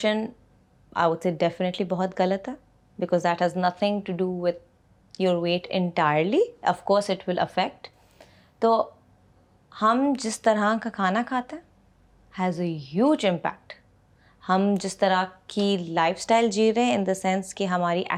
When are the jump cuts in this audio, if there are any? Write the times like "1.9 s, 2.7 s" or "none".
none